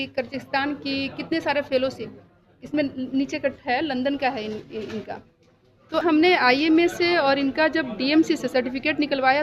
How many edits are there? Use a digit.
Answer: 1